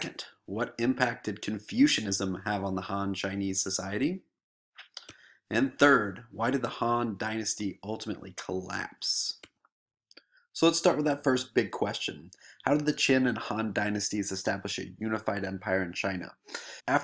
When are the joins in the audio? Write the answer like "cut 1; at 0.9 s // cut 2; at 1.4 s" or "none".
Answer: cut 1; at 15.7 s